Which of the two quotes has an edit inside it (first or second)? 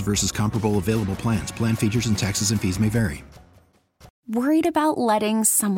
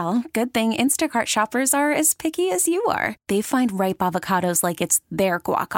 first